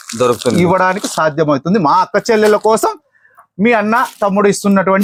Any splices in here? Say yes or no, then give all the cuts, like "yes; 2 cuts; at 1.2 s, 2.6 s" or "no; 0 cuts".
no; 0 cuts